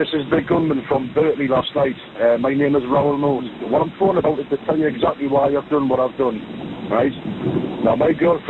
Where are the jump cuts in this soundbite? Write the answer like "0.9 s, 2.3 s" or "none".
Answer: none